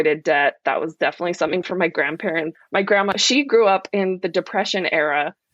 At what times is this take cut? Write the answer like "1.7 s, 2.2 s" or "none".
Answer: 3.1 s